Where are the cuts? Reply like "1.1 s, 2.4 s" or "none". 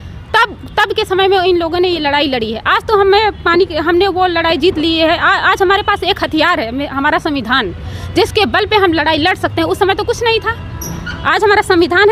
none